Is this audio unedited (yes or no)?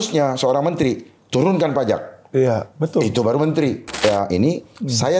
no